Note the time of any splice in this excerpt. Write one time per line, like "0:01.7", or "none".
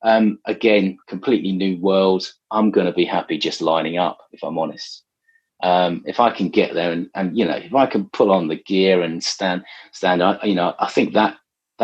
none